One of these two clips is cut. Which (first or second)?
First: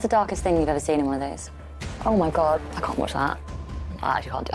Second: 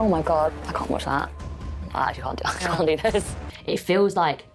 second